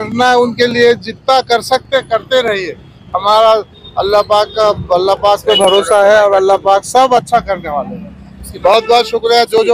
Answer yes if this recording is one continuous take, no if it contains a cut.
yes